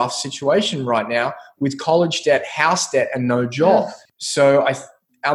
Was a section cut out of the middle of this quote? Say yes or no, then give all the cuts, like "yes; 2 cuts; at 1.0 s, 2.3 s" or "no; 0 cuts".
yes; 1 cut; at 4.0 s